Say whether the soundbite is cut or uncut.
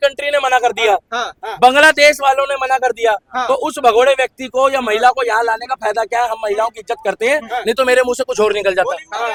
uncut